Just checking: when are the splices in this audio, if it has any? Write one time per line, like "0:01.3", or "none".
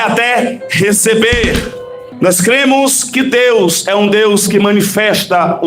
0:02.1